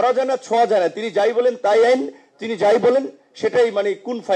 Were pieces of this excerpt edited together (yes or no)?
no